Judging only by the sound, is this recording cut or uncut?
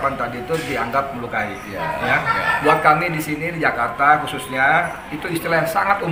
uncut